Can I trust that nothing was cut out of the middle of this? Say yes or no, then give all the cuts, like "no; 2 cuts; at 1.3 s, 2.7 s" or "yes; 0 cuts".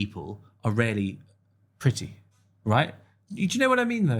yes; 0 cuts